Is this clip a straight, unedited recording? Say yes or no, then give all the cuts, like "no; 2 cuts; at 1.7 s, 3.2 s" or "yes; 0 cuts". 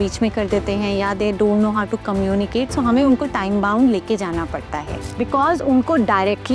no; 1 cut; at 5.0 s